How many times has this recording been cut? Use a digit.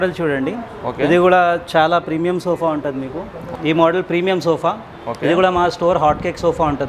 1